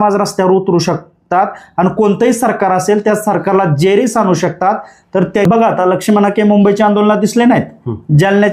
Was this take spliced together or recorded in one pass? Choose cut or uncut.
cut